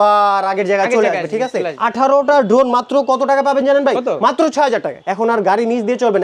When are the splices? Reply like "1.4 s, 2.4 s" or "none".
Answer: 1.8 s, 5.0 s